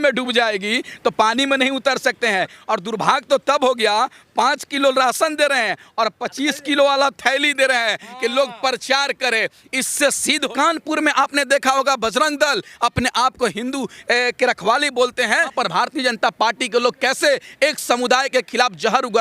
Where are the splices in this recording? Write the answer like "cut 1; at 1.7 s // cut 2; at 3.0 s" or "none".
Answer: cut 1; at 2.6 s // cut 2; at 10.4 s // cut 3; at 15.5 s